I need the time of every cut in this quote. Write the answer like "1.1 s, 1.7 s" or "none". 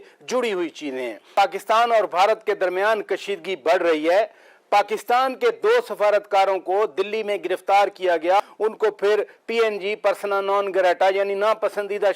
1.3 s, 8.5 s